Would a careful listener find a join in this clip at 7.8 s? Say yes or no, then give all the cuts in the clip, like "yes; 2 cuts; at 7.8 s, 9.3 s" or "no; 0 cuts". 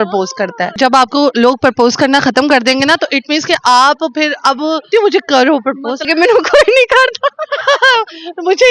no; 3 cuts; at 0.8 s, 4.9 s, 6.1 s